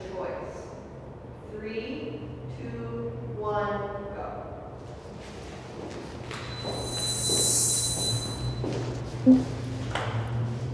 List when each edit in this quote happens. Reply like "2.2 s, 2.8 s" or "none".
none